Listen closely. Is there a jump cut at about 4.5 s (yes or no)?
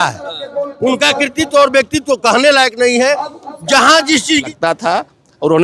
yes